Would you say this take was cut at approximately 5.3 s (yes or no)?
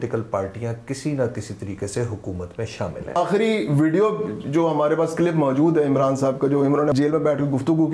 no